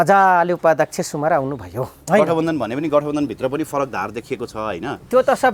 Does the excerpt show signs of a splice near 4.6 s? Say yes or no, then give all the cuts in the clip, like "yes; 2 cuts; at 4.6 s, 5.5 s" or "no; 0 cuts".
no; 1 cut; at 2.0 s